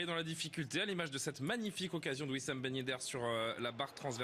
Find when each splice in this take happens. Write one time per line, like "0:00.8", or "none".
0:01.0